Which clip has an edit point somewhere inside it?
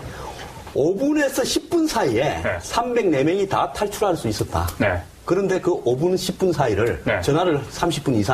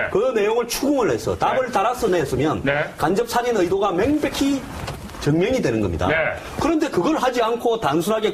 first; 1 cut; at 2.3 s

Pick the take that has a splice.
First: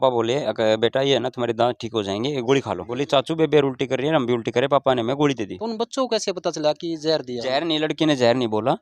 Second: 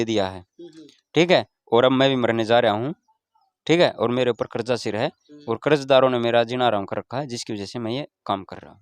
first; 2 cuts; at 2.9 s, 5.6 s

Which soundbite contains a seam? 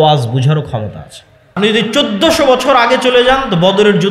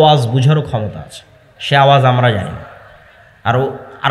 first; 1 cut; at 1.6 s

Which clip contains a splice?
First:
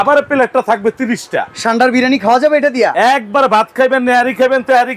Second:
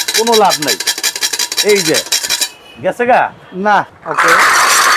second; 1 cut; at 3.9 s

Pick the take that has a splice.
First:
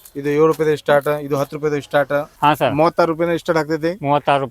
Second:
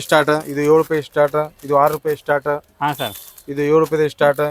first; 1 cut; at 2.3 s

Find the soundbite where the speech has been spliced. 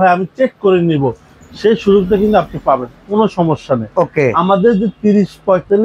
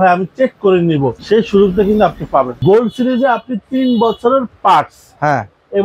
second; 2 cuts; at 1.2 s, 2.6 s

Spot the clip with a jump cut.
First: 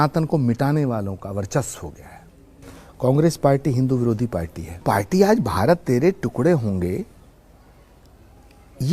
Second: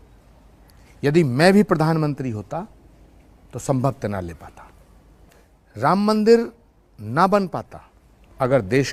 first; 1 cut; at 4.8 s

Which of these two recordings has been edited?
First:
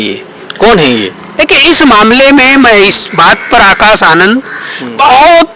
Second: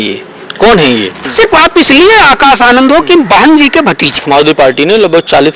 second; 2 cuts; at 1.2 s, 4.2 s

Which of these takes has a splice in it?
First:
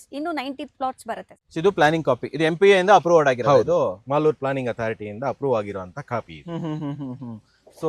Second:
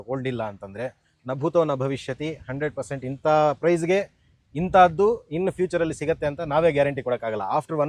first; 1 cut; at 1.3 s

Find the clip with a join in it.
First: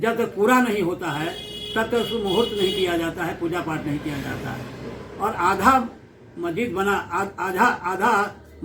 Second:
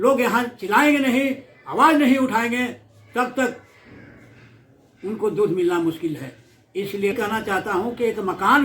second; 1 cut; at 7.1 s

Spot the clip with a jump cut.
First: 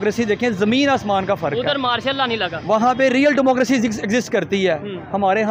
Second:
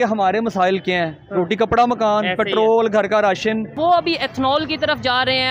second; 1 cut; at 3.8 s

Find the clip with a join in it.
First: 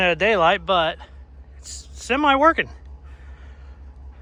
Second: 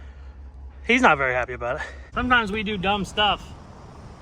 second; 1 cut; at 2.0 s

